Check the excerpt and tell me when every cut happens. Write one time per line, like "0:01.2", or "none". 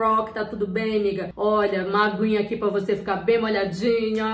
0:01.3